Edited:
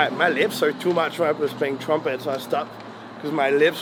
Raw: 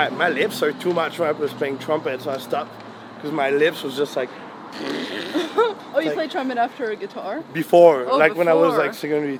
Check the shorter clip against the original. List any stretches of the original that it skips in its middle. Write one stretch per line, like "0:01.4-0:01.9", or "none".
none